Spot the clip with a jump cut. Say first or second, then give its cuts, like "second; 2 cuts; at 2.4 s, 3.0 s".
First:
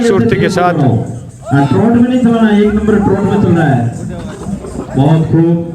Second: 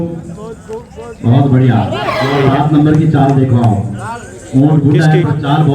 second; 1 cut; at 2.4 s